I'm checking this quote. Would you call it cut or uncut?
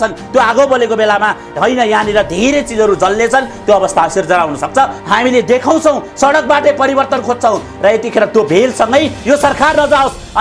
cut